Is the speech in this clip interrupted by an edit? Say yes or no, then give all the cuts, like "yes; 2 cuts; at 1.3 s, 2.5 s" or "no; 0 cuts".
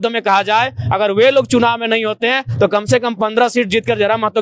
no; 0 cuts